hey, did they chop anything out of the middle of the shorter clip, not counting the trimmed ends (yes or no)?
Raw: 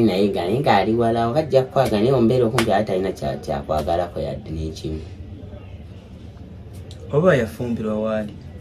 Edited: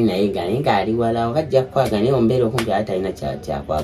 no